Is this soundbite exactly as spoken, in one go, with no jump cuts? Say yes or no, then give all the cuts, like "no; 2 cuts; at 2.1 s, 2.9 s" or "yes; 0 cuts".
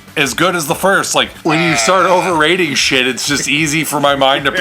no; 1 cut; at 1.3 s